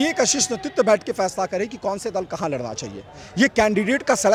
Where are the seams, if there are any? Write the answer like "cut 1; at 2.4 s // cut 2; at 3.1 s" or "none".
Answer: none